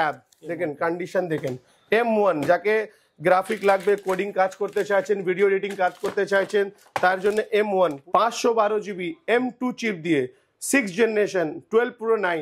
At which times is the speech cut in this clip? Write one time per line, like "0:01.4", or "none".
0:08.0